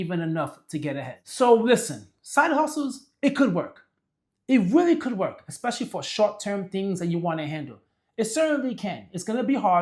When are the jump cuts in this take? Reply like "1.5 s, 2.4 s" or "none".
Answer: 1.2 s